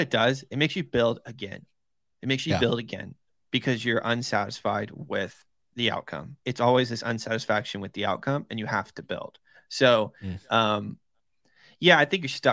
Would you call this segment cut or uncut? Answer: uncut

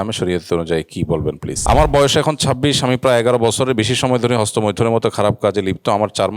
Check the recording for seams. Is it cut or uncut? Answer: cut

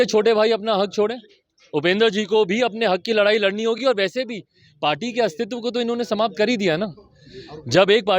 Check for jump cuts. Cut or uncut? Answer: uncut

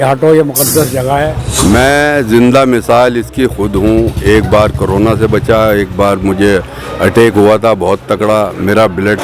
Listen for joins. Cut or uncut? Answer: cut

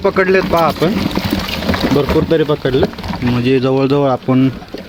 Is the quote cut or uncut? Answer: uncut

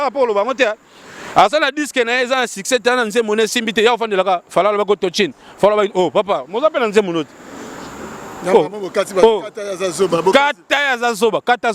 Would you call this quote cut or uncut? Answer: uncut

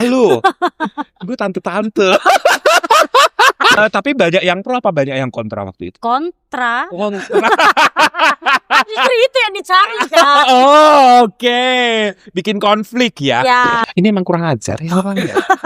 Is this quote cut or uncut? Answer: cut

